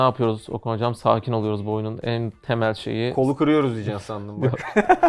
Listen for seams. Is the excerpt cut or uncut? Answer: uncut